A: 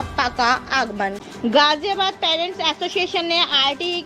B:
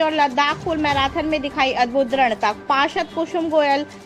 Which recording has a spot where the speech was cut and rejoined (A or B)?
A